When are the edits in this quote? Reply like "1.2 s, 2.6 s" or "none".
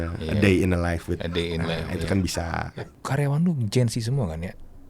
2.8 s